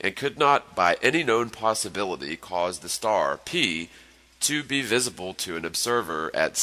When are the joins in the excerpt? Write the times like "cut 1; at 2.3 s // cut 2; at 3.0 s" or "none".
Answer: cut 1; at 5.3 s